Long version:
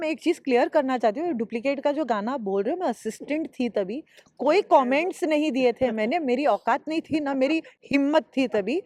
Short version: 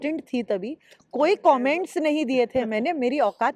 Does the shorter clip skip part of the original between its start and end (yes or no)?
no